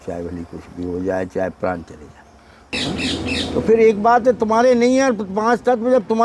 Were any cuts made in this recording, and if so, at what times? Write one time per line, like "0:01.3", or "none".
0:02.7